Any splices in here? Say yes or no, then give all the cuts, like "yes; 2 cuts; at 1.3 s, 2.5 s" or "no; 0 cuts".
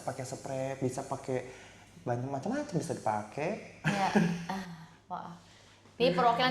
no; 0 cuts